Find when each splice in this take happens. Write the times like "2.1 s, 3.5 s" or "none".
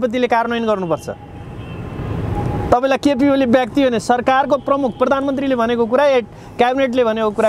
none